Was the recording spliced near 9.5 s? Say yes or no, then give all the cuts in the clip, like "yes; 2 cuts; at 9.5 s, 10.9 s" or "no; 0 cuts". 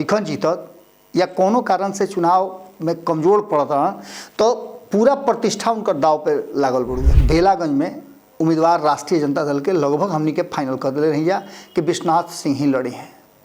no; 1 cut; at 7.0 s